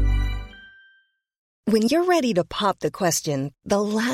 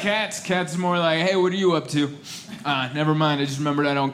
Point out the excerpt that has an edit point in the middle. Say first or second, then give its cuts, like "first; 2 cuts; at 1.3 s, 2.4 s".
first; 1 cut; at 1.5 s